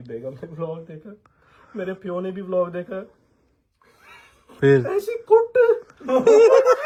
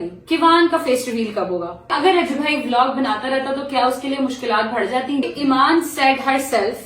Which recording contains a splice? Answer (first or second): second